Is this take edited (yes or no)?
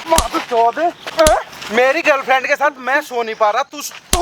yes